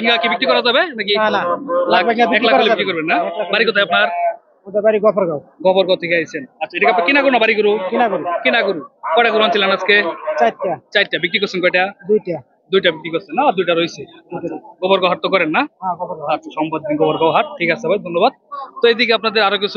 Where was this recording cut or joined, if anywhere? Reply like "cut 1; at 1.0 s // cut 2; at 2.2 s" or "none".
none

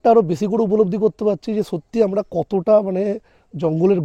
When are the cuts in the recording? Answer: none

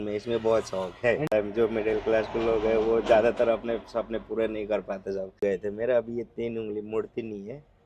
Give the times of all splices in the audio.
cut 1; at 1.3 s // cut 2; at 5.4 s

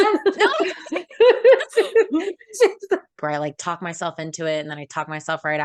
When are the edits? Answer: cut 1; at 3.1 s

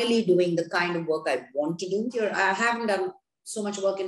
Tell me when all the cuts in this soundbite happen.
cut 1; at 2.2 s

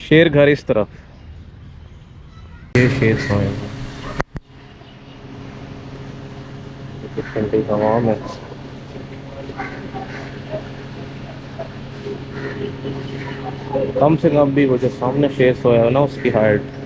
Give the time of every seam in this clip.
cut 1; at 2.7 s

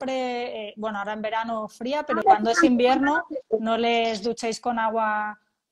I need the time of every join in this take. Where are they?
cut 1; at 2.2 s

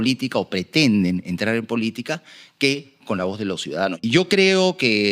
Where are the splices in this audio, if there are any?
cut 1; at 4.0 s

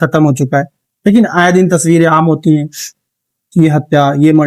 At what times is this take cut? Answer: none

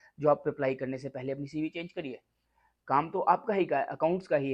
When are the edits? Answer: none

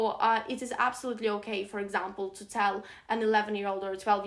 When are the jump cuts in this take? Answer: none

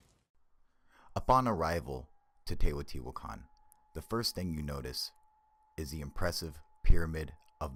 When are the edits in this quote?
none

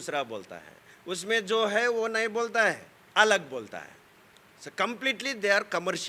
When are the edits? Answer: none

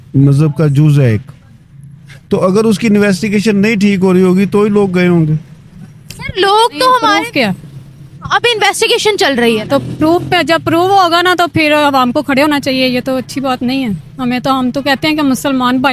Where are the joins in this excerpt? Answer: cut 1; at 7.2 s

